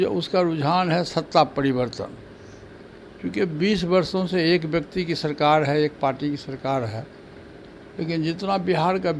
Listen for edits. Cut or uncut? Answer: uncut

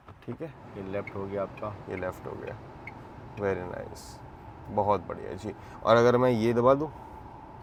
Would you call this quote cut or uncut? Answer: uncut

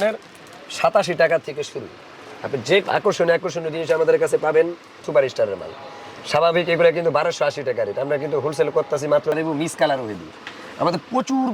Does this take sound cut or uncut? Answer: cut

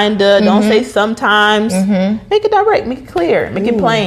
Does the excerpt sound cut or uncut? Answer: uncut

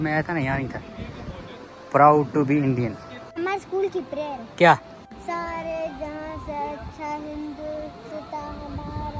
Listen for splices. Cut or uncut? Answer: cut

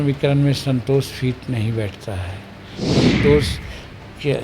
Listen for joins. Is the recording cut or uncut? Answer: cut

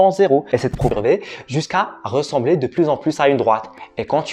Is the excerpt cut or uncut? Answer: cut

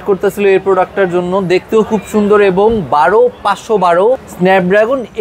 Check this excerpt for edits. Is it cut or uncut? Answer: cut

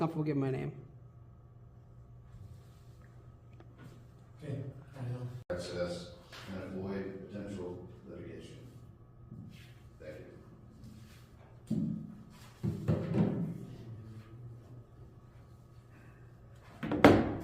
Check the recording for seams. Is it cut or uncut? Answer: cut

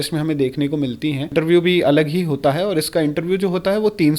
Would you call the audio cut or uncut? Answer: cut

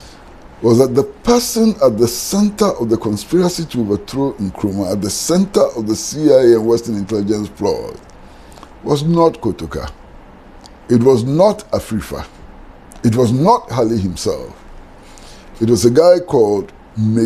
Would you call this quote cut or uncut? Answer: uncut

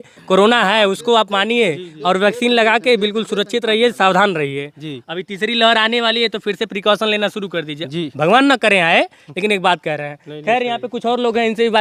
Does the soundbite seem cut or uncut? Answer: uncut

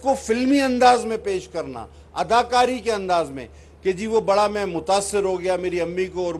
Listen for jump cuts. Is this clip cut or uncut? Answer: uncut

